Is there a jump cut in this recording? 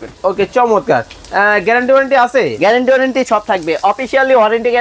no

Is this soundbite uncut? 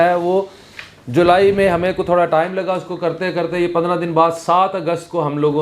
yes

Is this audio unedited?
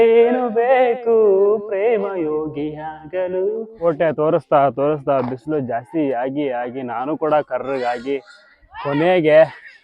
no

